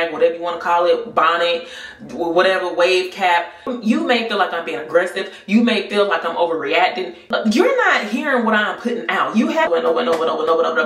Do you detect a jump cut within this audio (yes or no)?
yes